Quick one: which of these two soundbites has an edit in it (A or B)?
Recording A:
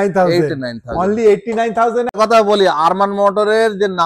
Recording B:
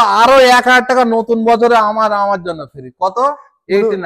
A